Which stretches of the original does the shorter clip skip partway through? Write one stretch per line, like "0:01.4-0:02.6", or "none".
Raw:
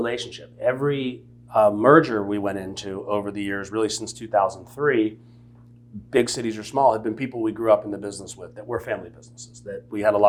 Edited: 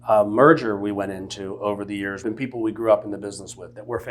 0:03.7-0:07.0

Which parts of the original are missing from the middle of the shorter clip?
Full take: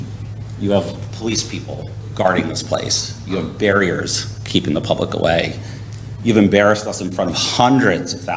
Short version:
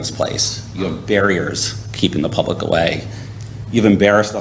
none

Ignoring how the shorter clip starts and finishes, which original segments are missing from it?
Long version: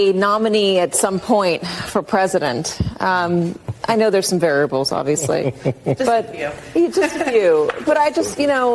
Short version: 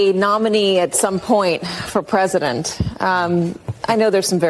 none

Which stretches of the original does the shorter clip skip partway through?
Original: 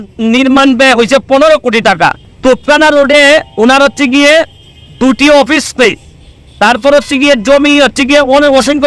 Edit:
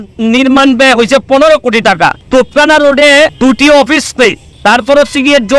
0:02.2-0:02.3
0:03.5-0:04.9
0:06.1-0:06.4

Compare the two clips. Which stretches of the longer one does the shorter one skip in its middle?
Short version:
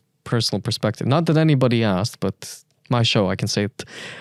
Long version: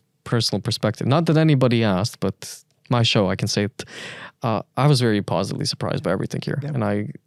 none

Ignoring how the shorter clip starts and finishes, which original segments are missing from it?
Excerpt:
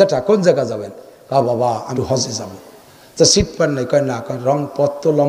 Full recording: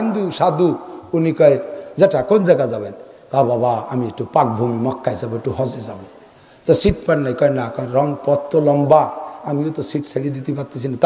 0:04.0-0:05.4

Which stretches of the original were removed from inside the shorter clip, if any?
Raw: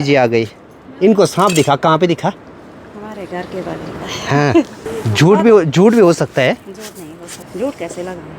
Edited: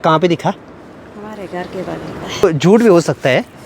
0:04.2-0:05.6

